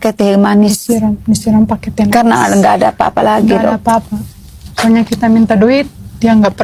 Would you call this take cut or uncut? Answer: uncut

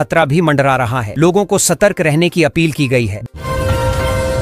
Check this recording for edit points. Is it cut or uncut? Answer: cut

